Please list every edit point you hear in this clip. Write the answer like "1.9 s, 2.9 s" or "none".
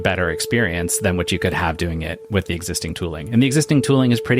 none